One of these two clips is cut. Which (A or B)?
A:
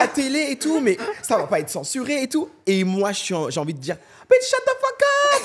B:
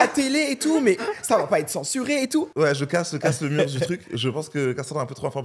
B